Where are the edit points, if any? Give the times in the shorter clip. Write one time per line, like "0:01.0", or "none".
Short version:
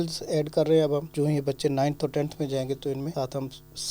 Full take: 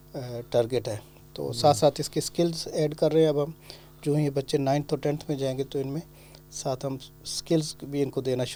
0:01.1
0:03.1